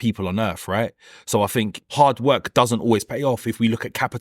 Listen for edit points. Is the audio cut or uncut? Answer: cut